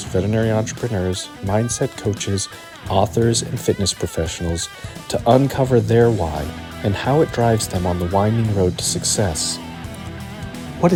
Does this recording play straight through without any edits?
yes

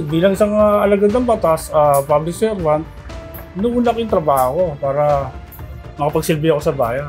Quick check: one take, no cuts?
yes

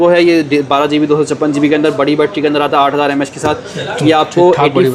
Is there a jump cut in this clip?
no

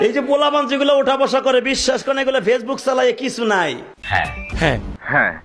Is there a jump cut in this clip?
no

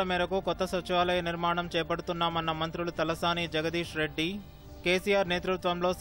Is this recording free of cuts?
yes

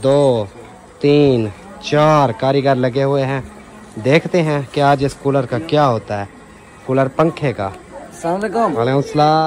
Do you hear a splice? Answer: no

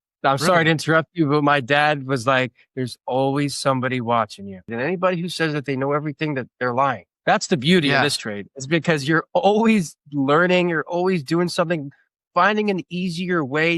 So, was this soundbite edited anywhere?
yes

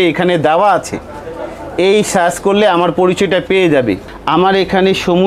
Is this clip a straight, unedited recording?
no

